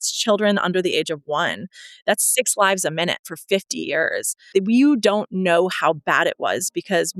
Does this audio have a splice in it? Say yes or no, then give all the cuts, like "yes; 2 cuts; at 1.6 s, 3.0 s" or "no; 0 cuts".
yes; 1 cut; at 4.5 s